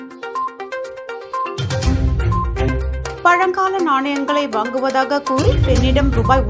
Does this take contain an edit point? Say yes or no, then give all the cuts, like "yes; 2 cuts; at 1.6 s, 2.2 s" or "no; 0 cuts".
yes; 1 cut; at 0.9 s